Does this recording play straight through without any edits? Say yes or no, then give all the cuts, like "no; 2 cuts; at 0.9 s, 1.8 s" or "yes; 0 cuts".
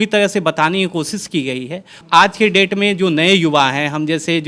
no; 1 cut; at 2.0 s